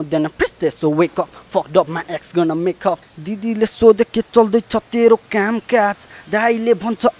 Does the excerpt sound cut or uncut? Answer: cut